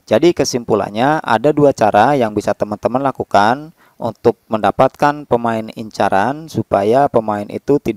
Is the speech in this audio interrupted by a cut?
no; 0 cuts

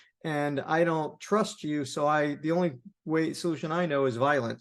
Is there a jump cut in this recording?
no; 0 cuts

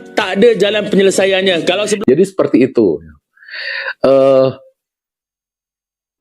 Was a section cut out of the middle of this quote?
yes; 1 cut; at 1.9 s

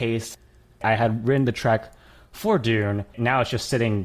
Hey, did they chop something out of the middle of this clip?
yes; 2 cuts; at 0.8 s, 3.1 s

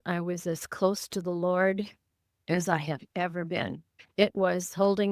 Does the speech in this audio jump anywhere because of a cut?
no; 0 cuts

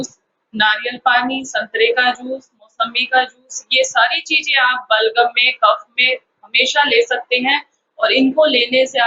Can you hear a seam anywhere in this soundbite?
no; 0 cuts

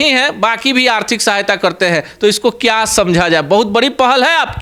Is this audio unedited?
yes; 0 cuts

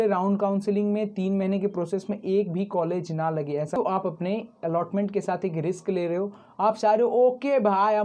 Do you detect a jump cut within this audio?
yes; 1 cut; at 3.8 s

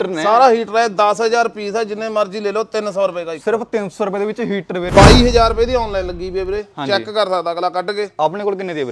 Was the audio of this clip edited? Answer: yes; 1 cut; at 4.9 s

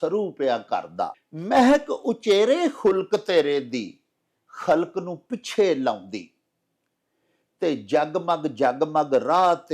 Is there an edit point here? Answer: yes; 1 cut; at 1.3 s

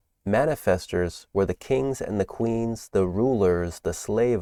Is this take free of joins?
yes; 0 cuts

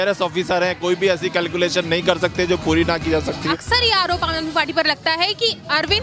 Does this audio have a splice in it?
yes; 1 cut; at 3.4 s

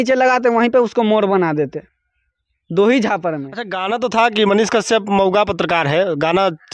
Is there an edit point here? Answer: yes; 1 cut; at 3.5 s

